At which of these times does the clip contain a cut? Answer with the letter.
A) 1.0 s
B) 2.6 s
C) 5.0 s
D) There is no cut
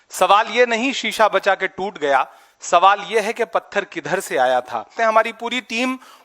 C